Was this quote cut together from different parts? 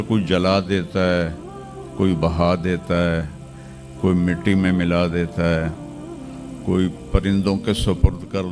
no; 0 cuts

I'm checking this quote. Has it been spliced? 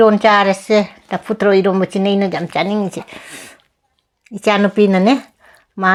no; 0 cuts

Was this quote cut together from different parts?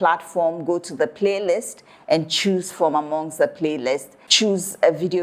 yes; 1 cut; at 4.2 s

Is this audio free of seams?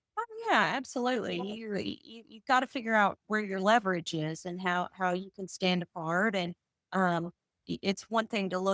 yes; 0 cuts

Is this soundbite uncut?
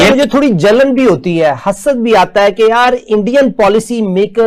yes; 0 cuts

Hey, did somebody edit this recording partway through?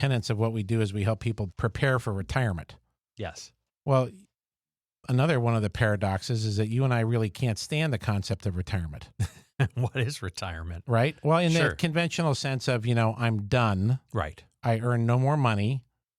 yes; 1 cut; at 1.5 s

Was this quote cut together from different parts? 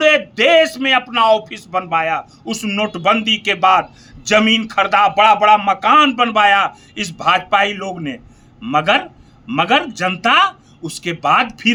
no; 0 cuts

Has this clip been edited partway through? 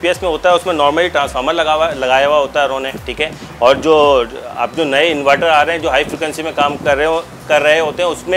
no; 0 cuts

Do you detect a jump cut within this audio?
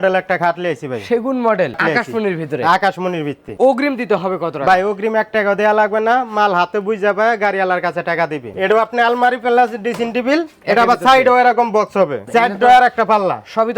yes; 4 cuts; at 1.8 s, 3.4 s, 8.5 s, 12.2 s

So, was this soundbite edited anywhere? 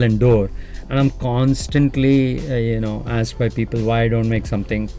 no; 0 cuts

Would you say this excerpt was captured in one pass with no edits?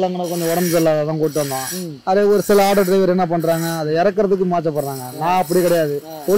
yes; 0 cuts

